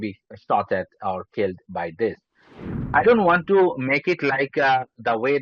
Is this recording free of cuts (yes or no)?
no